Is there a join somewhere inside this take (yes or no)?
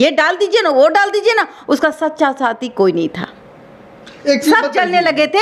no